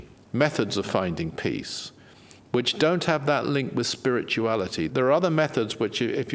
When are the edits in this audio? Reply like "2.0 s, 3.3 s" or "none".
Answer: 4.9 s